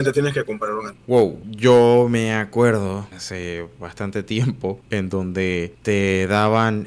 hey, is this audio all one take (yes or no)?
no